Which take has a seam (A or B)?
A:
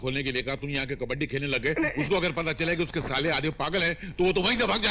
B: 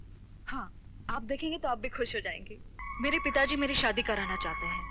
B